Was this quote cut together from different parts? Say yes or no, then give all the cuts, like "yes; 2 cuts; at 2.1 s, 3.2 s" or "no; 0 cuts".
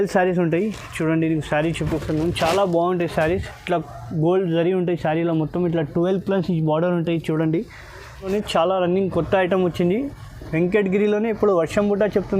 yes; 1 cut; at 8.3 s